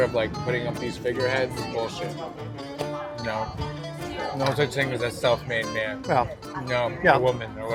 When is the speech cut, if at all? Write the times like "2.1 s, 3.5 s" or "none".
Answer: none